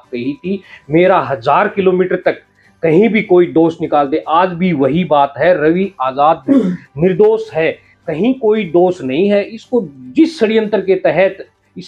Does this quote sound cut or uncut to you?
uncut